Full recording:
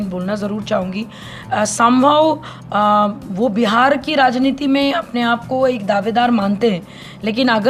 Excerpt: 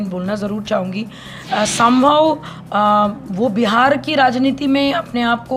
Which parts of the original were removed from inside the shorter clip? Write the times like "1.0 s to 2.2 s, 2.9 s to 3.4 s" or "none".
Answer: none